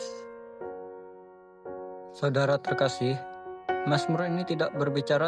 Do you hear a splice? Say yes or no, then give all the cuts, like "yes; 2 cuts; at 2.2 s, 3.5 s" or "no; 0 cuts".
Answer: yes; 1 cut; at 2.2 s